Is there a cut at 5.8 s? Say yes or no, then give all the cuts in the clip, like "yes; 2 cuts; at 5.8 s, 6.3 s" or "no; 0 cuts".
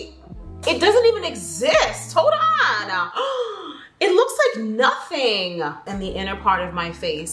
yes; 1 cut; at 5.8 s